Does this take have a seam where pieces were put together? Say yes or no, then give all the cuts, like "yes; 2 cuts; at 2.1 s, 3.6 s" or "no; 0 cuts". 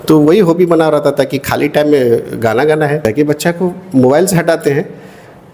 yes; 1 cut; at 3.0 s